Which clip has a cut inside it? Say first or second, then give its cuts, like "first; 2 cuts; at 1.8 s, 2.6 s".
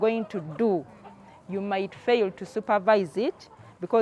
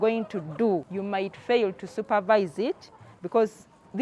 second; 1 cut; at 0.9 s